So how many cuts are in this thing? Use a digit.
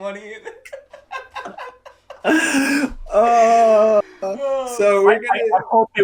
0